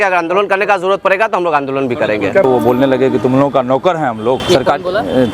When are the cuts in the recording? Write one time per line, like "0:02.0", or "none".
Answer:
0:02.4